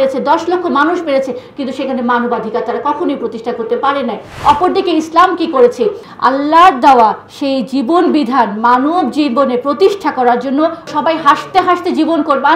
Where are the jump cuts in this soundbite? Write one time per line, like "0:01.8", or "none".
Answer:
0:04.3
0:06.1
0:10.9

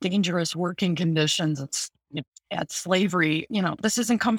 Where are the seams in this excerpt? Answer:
0:03.5

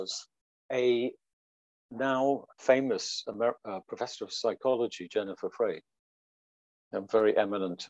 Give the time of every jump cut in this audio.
0:02.5

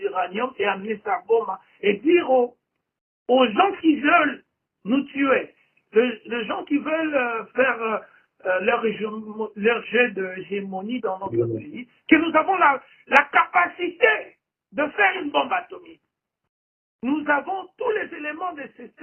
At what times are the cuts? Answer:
none

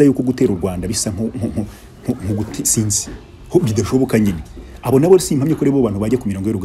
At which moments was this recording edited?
none

